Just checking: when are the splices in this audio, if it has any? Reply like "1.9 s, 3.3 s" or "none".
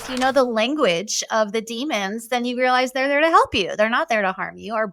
none

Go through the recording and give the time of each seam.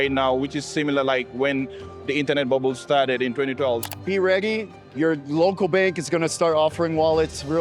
3.8 s

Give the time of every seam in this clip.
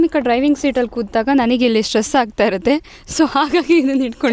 none

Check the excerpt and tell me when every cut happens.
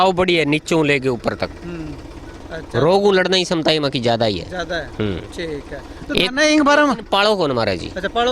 2.4 s

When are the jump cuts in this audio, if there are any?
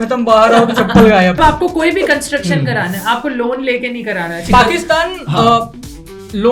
1.4 s, 4.5 s

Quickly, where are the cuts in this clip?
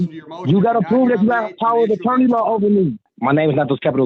3.1 s

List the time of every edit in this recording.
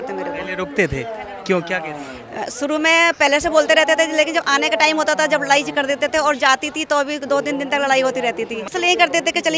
8.6 s

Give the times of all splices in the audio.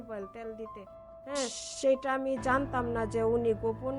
1.6 s

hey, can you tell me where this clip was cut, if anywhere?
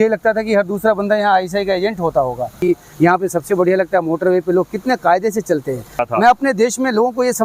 2.6 s, 6.0 s

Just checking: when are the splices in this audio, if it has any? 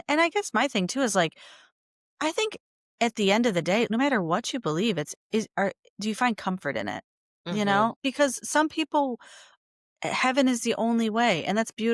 3.9 s, 8.0 s

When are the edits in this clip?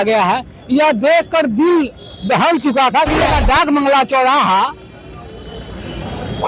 3.3 s

